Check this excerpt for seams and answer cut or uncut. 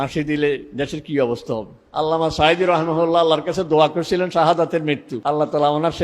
cut